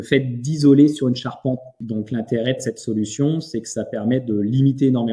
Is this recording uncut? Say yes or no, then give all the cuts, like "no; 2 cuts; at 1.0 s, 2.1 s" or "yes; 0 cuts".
no; 1 cut; at 1.7 s